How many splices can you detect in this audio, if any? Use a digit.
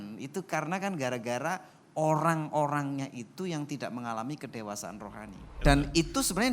1